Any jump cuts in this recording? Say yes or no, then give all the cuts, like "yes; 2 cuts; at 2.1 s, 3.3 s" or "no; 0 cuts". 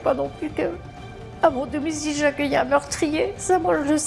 no; 0 cuts